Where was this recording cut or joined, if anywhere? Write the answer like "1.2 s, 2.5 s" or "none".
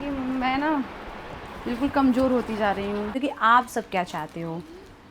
3.1 s